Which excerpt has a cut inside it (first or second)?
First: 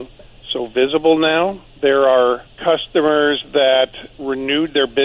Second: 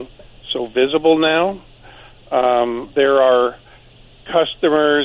first